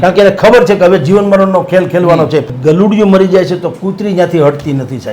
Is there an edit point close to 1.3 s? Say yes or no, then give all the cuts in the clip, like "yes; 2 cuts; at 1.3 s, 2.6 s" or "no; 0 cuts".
no; 1 cut; at 2.5 s